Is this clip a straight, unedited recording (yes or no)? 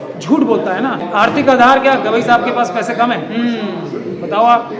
no